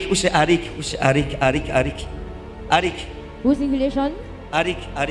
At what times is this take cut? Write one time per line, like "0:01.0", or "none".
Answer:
none